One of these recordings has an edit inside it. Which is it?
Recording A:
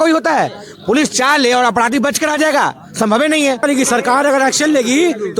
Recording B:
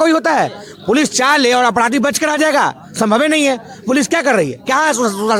A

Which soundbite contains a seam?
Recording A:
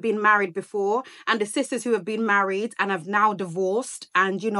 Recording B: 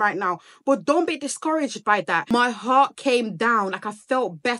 B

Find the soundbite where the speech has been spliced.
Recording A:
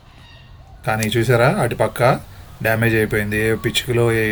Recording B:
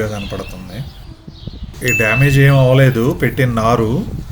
B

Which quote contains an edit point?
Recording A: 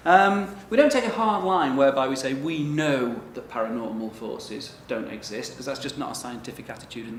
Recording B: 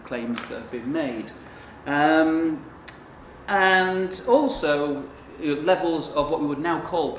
B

